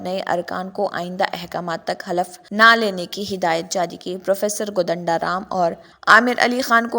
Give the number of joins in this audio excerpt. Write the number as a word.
two